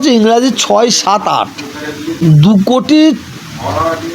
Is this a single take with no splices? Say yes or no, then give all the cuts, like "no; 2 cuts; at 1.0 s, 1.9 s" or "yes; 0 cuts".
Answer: no; 1 cut; at 2.1 s